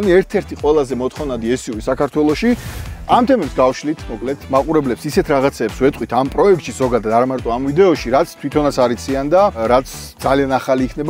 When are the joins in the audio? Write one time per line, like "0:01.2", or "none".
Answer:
0:02.7
0:09.6